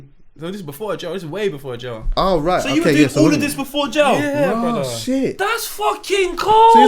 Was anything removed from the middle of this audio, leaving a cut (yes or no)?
no